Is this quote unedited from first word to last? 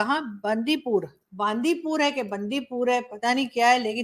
yes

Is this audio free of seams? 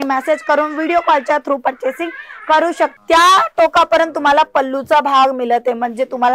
no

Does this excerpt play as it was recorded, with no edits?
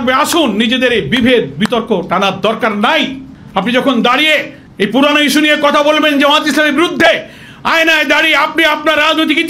yes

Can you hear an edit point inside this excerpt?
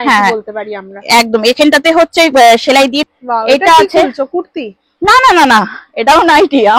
yes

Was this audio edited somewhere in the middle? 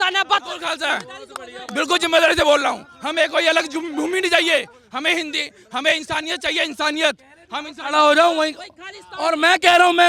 no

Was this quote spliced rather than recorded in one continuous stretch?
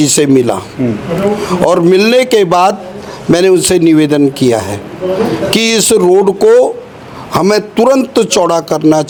no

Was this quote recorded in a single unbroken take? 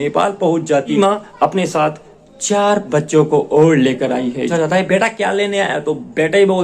no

